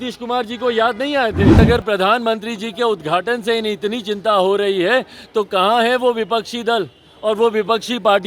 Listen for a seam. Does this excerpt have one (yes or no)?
yes